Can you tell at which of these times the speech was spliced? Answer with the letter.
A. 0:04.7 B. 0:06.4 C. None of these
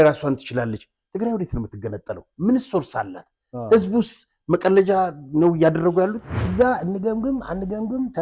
B